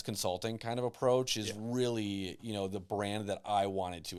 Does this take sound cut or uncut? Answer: uncut